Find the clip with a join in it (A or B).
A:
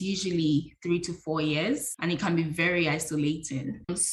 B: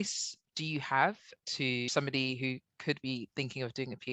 B